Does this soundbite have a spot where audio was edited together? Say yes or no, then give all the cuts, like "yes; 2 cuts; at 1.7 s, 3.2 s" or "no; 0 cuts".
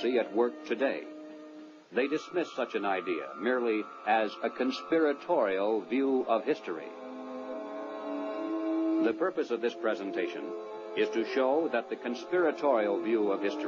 yes; 1 cut; at 8.2 s